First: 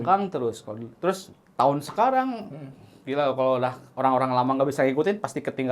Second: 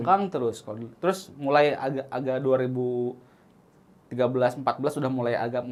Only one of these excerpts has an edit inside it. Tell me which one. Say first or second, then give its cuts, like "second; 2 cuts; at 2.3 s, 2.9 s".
first; 1 cut; at 1.3 s